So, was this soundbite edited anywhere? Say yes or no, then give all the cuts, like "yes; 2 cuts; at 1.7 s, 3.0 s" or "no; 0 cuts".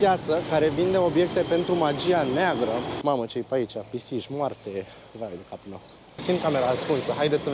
yes; 2 cuts; at 2.9 s, 6.2 s